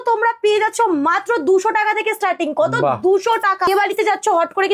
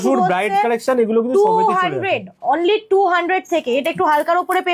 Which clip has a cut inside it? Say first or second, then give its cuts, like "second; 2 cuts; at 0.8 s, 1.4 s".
first; 1 cut; at 3.7 s